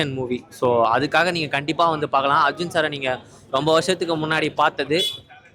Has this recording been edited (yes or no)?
no